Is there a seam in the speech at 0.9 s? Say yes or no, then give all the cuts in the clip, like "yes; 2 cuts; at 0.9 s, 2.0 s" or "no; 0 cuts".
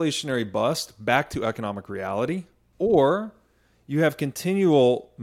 no; 1 cut; at 2.6 s